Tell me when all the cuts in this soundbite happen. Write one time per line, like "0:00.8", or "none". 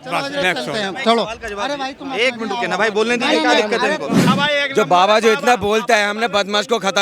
0:04.3